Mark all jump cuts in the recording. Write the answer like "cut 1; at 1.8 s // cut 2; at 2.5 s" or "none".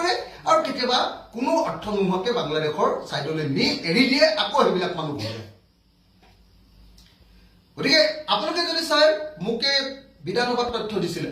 none